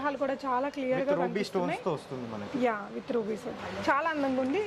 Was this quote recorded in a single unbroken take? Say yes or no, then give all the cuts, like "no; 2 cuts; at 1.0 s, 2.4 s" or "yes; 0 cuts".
no; 1 cut; at 3.5 s